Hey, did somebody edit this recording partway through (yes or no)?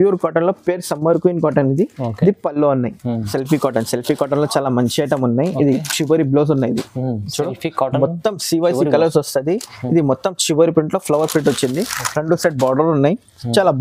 yes